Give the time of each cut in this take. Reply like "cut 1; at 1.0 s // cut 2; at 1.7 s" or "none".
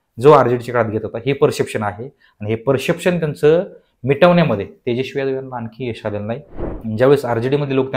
cut 1; at 6.6 s